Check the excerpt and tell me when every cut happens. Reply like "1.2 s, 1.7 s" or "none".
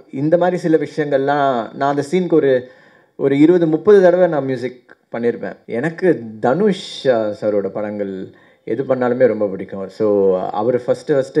5.6 s